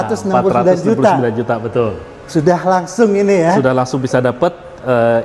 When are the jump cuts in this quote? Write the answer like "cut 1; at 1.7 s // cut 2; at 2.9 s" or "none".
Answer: none